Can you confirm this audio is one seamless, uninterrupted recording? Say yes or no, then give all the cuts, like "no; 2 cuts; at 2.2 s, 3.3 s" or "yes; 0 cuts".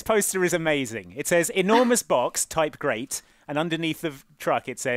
yes; 0 cuts